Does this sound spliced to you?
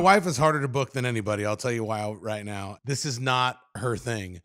yes; 1 cut; at 2.7 s

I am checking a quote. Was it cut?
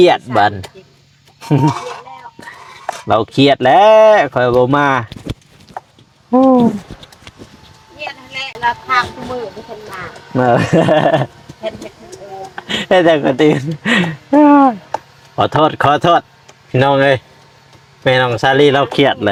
no; 0 cuts

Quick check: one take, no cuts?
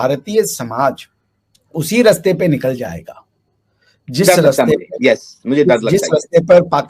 yes; 0 cuts

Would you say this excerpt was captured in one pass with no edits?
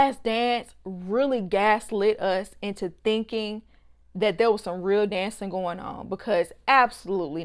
yes; 0 cuts

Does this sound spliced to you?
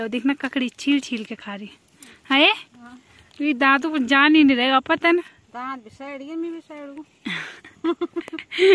no; 0 cuts

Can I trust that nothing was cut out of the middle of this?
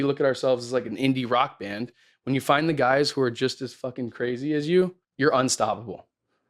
no; 1 cut; at 5.0 s

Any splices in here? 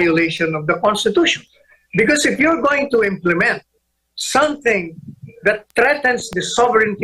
no; 0 cuts

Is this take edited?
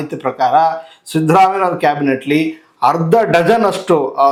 no; 0 cuts

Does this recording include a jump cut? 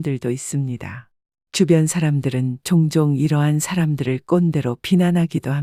no; 0 cuts

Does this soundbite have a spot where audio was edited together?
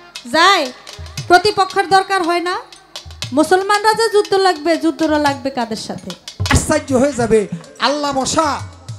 yes; 1 cut; at 6.5 s

